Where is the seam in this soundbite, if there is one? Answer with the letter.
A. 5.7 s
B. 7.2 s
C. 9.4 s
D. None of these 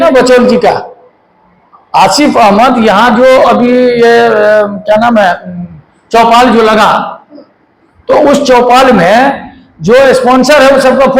D